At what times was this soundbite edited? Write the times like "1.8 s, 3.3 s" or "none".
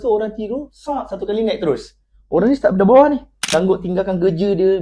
3.3 s